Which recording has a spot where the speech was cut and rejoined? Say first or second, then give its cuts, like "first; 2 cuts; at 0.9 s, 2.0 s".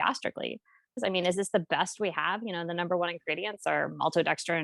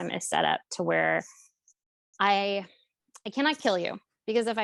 first; 1 cut; at 1.0 s